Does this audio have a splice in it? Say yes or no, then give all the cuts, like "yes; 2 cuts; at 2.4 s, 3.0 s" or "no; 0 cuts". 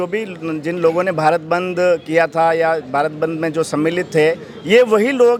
no; 0 cuts